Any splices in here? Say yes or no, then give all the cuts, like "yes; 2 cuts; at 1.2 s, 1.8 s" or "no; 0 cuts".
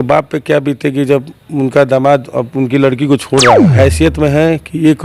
yes; 1 cut; at 3.7 s